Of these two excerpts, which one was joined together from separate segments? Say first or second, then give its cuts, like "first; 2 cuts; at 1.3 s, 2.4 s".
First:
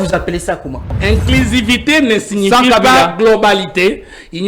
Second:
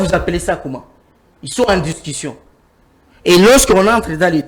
first; 1 cut; at 0.9 s